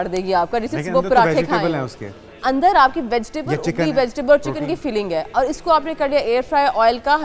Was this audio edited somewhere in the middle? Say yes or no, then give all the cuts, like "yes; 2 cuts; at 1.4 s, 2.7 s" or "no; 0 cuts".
no; 0 cuts